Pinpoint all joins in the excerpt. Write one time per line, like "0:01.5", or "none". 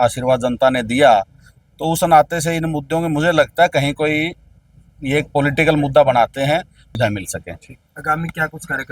0:06.8